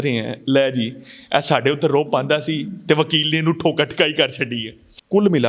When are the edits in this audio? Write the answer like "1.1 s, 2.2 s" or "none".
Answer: none